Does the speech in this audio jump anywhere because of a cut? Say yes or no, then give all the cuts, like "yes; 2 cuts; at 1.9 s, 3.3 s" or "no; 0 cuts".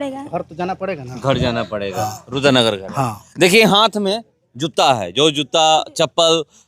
no; 0 cuts